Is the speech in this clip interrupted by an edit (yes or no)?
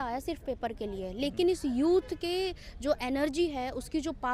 no